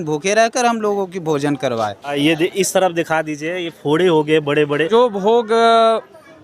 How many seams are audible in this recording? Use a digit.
2